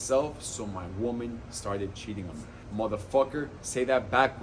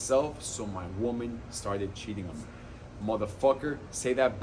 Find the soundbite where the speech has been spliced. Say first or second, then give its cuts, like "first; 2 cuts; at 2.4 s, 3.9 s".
first; 1 cut; at 2.5 s